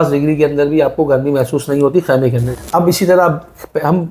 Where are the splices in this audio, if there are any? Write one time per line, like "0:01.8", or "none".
0:02.5